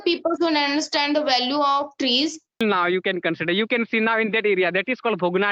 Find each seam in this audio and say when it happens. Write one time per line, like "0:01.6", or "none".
0:02.6